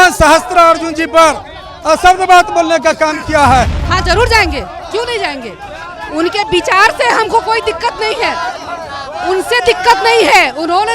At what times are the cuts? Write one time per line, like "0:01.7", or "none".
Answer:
0:03.8